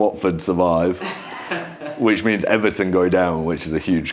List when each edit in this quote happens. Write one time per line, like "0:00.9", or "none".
none